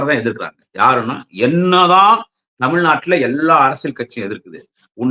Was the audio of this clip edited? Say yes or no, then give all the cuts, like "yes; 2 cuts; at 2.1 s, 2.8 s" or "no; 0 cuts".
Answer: no; 0 cuts